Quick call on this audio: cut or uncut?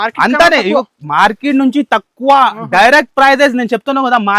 uncut